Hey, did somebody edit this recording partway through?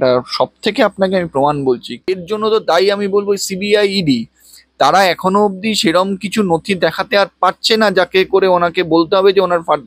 yes; 1 cut; at 2.2 s

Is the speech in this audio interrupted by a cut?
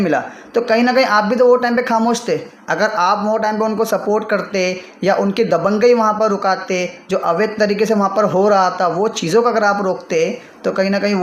no; 0 cuts

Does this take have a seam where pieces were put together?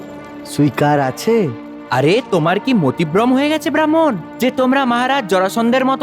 no; 0 cuts

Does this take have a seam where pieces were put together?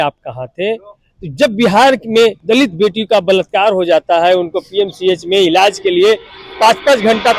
yes; 1 cut; at 2.4 s

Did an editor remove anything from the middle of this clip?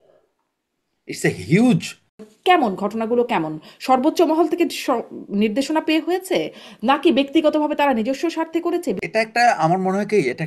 yes; 2 cuts; at 2.2 s, 9.0 s

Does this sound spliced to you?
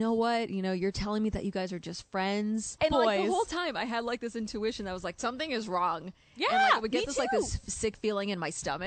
yes; 1 cut; at 2.8 s

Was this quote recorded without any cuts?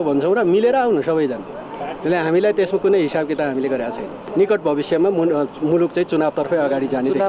no; 1 cut; at 4.1 s

